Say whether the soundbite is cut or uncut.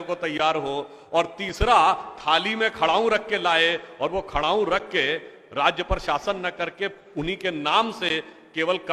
uncut